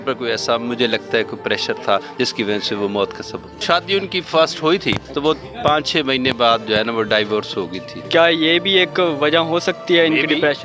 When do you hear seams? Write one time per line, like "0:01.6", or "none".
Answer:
0:03.6
0:05.1
0:08.0